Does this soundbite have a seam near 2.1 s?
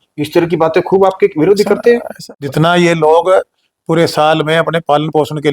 yes; 1 cut; at 2.1 s

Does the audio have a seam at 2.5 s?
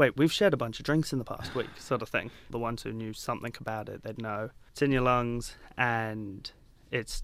yes; 2 cuts; at 2.5 s, 4.6 s

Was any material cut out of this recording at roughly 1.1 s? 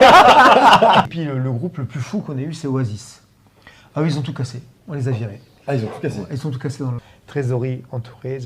yes; 2 cuts; at 1.1 s, 7.0 s

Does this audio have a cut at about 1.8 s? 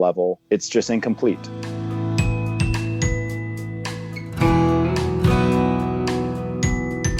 no; 0 cuts

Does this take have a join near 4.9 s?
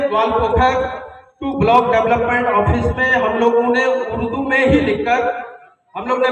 no; 0 cuts

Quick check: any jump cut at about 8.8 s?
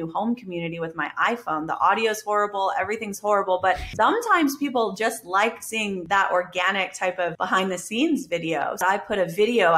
yes; 4 cuts; at 3.9 s, 6.0 s, 7.4 s, 8.8 s

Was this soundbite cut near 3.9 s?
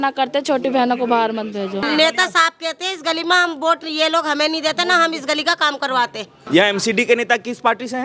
no; 2 cuts; at 1.8 s, 6.3 s

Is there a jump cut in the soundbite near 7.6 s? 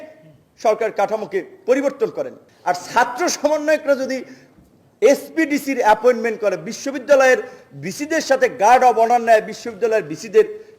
no; 1 cut; at 2.4 s

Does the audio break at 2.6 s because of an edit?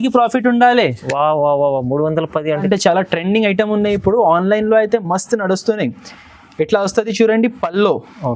yes; 1 cut; at 2.6 s

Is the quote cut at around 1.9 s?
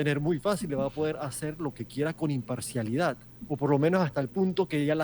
no; 1 cut; at 3.3 s

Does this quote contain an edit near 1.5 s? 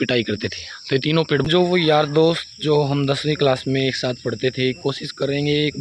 yes; 1 cut; at 1.5 s

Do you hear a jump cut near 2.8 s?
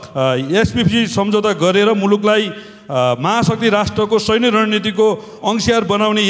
no; 0 cuts

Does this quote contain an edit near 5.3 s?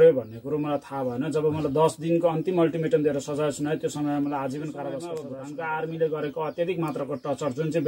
yes; 1 cut; at 5.3 s

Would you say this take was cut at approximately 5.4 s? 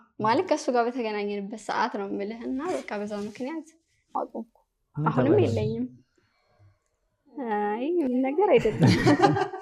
no; 1 cut; at 4.2 s

